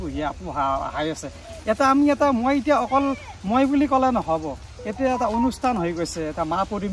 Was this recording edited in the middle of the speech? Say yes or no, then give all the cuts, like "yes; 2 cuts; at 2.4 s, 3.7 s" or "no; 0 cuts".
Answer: no; 0 cuts